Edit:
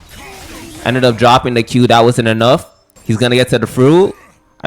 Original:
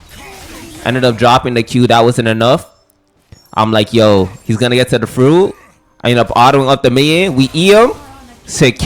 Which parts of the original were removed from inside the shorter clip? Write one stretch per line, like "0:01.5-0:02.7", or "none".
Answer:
0:03.0-0:04.4